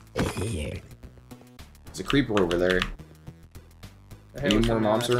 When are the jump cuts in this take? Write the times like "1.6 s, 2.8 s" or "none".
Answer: none